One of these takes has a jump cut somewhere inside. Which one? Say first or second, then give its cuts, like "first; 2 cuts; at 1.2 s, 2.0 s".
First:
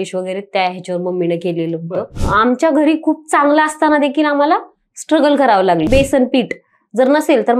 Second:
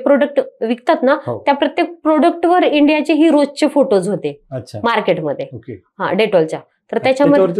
first; 2 cuts; at 2.2 s, 5.9 s